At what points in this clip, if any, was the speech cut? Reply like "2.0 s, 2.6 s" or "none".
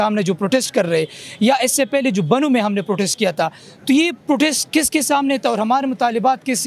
none

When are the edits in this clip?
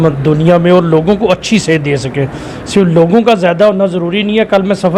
none

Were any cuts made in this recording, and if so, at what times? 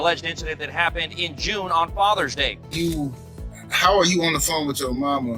2.6 s

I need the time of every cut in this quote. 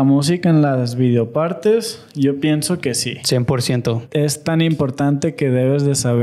3.1 s, 4.0 s

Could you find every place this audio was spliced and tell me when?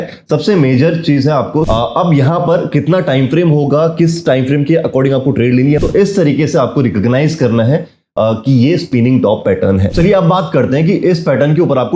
1.7 s, 5.8 s, 9.9 s

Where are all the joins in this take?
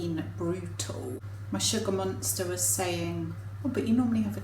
1.1 s

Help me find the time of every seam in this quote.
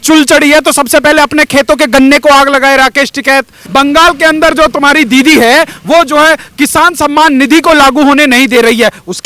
3.6 s

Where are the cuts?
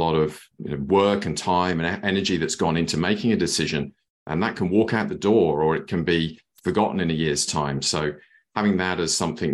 none

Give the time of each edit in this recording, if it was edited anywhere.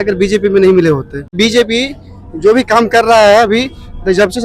1.4 s

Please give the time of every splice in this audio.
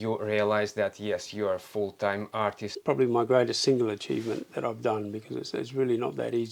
2.7 s

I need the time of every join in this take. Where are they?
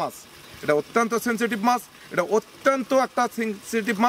none

